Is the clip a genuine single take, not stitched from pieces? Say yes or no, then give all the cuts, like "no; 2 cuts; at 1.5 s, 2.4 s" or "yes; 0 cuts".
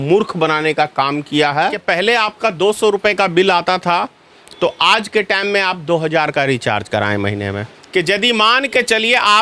no; 2 cuts; at 2.2 s, 7.7 s